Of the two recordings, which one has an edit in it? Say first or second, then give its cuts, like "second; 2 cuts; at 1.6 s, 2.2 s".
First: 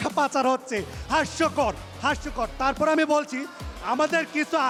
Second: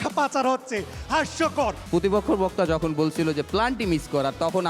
second; 1 cut; at 1.8 s